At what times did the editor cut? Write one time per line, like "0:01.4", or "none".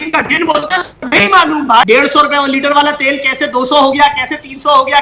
0:01.8